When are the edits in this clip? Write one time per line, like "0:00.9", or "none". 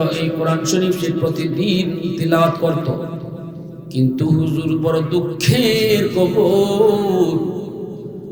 none